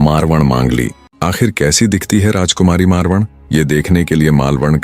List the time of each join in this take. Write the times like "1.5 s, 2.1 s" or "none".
1.1 s